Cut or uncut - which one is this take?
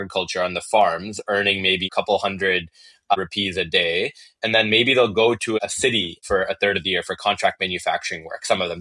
uncut